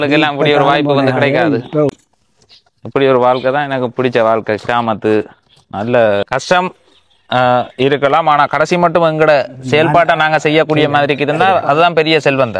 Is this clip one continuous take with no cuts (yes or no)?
no